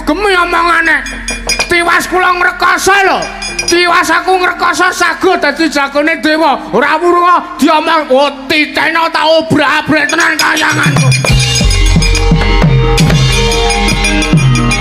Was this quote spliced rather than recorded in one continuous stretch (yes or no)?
no